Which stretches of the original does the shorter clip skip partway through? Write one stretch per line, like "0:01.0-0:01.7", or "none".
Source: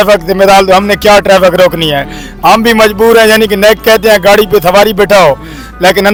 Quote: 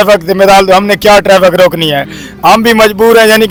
none